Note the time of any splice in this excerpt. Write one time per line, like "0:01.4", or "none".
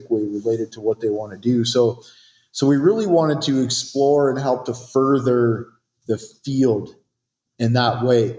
none